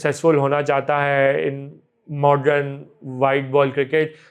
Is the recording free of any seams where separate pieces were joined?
yes; 0 cuts

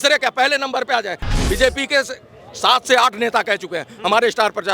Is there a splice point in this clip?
yes; 1 cut; at 1.3 s

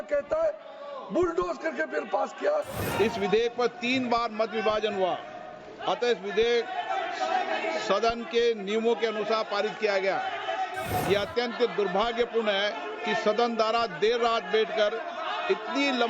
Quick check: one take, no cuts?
no; 2 cuts; at 2.8 s, 10.9 s

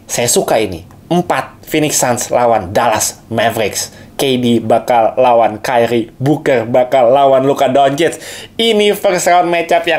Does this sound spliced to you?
no; 0 cuts

